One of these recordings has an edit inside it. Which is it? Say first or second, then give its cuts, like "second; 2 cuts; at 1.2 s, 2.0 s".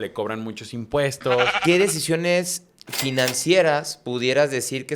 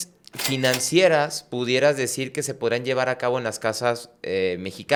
first; 1 cut; at 1.6 s